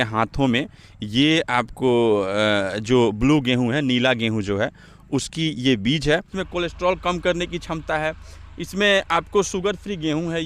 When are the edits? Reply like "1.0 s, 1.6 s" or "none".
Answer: 6.4 s